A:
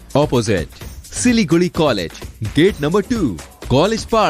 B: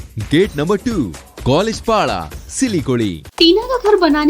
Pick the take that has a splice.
B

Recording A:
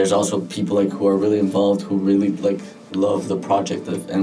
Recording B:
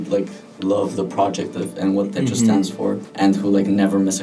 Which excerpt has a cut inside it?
B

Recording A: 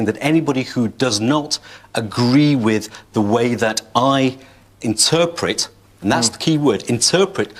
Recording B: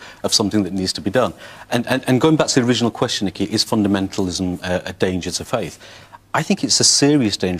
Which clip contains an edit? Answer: B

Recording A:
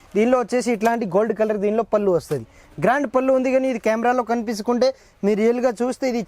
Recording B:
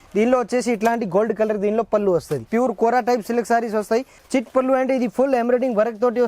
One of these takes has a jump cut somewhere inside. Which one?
B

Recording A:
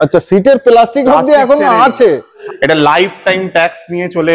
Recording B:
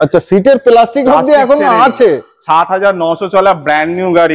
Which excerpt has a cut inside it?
A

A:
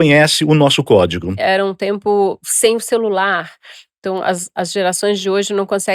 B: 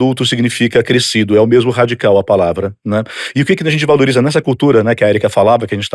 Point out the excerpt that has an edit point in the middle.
A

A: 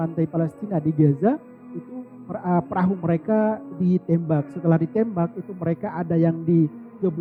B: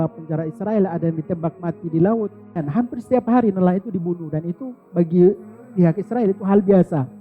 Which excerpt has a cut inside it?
B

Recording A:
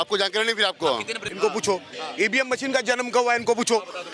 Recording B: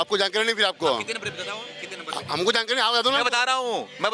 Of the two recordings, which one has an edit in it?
A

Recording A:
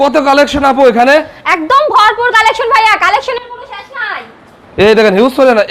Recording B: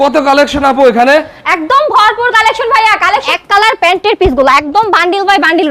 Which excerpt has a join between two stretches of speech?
B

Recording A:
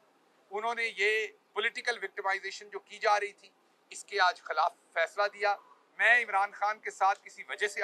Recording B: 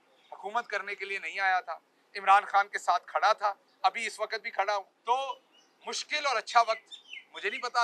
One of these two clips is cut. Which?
B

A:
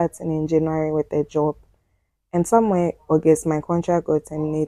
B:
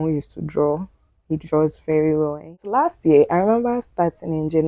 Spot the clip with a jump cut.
B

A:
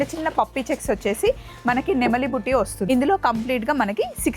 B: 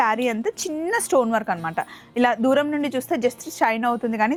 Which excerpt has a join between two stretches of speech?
A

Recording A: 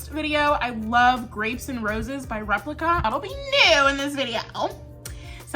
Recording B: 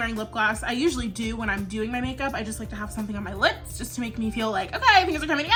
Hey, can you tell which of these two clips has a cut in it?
A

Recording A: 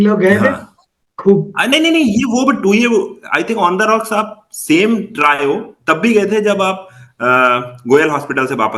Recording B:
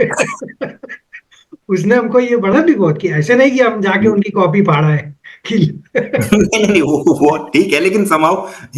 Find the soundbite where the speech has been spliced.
B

